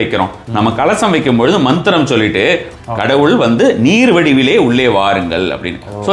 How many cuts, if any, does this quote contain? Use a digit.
1